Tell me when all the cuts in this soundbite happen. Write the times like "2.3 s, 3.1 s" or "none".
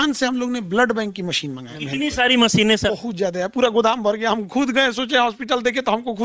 1.7 s, 2.9 s

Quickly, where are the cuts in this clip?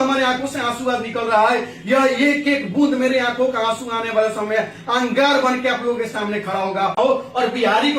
7.0 s

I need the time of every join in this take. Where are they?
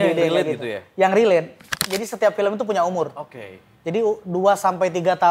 1.8 s

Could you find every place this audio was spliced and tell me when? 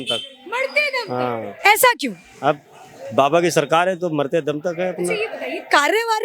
none

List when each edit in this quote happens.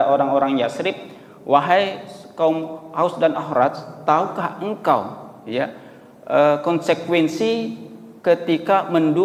none

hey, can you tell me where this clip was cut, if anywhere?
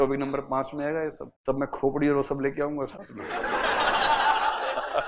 1.3 s

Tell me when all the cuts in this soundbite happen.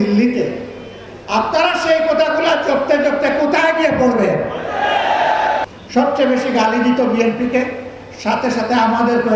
5.6 s

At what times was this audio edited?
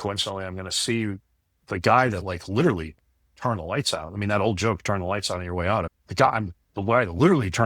6.0 s

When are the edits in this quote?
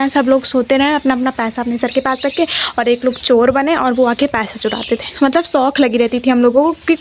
none

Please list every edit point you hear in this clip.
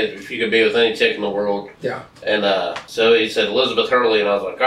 2.8 s

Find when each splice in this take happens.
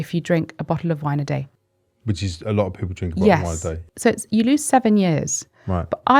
1.5 s, 3.8 s

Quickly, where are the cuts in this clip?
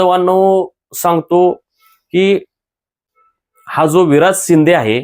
none

